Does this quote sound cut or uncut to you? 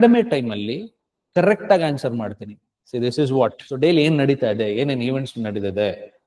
cut